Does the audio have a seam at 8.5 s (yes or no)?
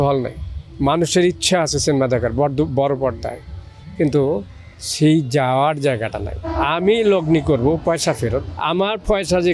yes